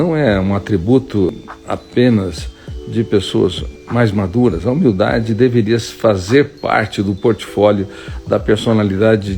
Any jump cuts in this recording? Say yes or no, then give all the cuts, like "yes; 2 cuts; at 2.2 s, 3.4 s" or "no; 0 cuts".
yes; 2 cuts; at 1.3 s, 3.8 s